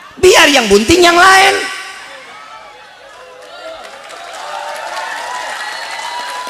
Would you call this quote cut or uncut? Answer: uncut